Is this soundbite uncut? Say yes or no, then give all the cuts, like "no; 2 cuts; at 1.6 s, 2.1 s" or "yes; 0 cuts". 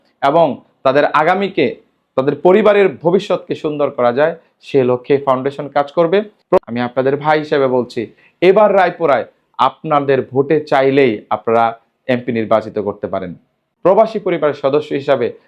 no; 2 cuts; at 6.6 s, 13.7 s